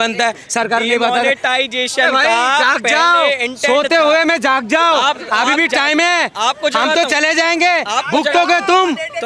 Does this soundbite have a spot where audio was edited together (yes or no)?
no